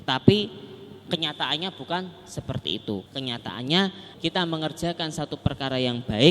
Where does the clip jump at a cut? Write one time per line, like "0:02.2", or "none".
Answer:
0:03.0
0:04.1